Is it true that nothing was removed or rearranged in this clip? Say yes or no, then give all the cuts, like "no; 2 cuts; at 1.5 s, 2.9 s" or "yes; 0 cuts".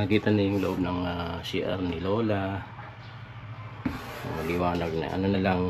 yes; 0 cuts